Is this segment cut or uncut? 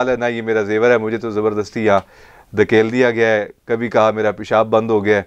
uncut